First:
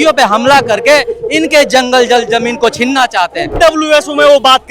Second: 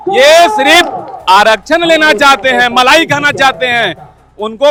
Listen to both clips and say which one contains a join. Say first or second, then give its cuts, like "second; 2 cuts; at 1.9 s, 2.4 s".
first; 1 cut; at 3.5 s